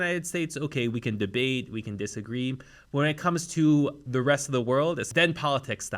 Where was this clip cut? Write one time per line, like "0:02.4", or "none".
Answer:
0:05.0